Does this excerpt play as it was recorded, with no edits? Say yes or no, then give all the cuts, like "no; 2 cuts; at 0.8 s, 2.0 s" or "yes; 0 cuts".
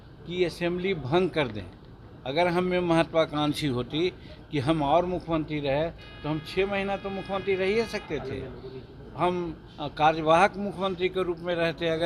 yes; 0 cuts